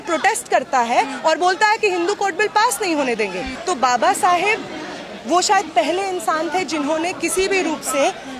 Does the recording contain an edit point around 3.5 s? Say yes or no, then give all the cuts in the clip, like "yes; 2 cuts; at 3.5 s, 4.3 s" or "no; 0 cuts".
yes; 1 cut; at 3.5 s